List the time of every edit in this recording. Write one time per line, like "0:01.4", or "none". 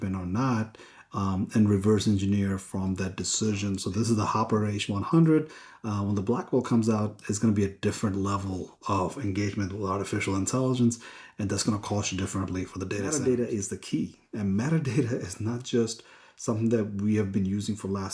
0:03.8
0:13.1